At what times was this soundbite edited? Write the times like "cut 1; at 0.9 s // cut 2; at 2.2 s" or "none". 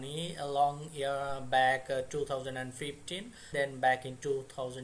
cut 1; at 3.4 s